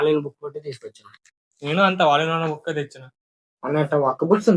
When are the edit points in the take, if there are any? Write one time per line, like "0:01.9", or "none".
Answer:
none